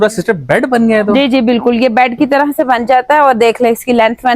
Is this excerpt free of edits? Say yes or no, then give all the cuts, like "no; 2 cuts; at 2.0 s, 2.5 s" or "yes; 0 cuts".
yes; 0 cuts